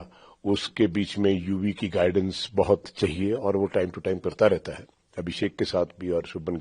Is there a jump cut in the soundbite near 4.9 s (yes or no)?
no